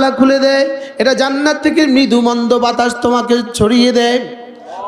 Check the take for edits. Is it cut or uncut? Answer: uncut